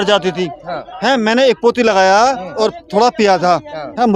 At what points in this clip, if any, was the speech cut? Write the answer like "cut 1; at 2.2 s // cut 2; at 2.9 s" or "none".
none